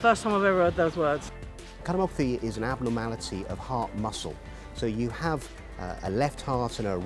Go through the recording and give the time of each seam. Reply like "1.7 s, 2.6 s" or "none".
1.3 s